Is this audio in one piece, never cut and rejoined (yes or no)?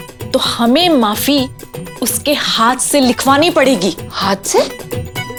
yes